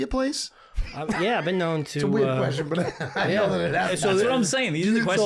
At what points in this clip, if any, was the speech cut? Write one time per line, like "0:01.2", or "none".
none